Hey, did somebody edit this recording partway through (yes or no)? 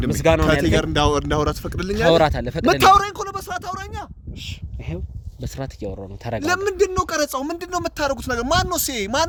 no